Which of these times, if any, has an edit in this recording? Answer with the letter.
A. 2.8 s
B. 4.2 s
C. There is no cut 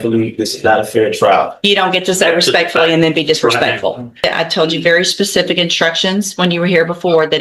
B